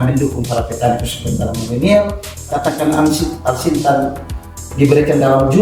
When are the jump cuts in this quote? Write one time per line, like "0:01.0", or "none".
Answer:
0:02.3